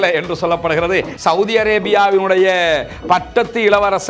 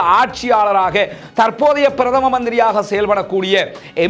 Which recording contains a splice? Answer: first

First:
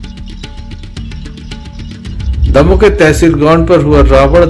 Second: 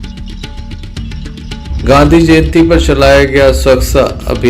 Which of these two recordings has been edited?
second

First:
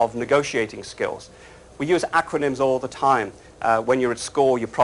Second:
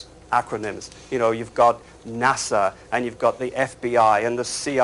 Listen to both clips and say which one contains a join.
first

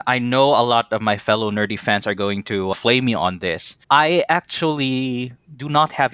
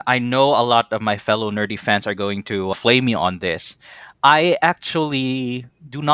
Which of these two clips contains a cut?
first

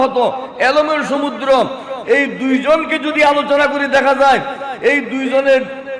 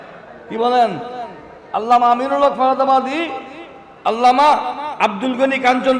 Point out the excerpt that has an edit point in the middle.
second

